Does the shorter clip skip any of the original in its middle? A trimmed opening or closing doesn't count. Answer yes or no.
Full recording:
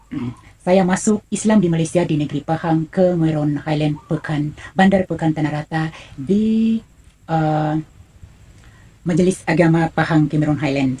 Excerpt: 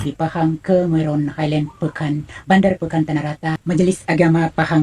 yes